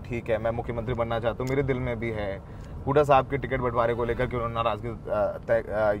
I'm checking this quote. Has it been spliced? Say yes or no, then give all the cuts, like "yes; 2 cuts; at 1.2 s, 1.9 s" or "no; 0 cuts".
no; 0 cuts